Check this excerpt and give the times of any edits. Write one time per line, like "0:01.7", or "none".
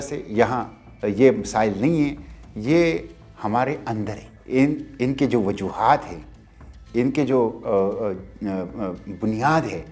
0:04.3